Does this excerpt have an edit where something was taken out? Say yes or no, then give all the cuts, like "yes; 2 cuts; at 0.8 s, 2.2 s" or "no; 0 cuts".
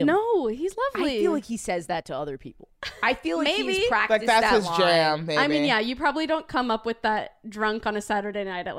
yes; 1 cut; at 1.1 s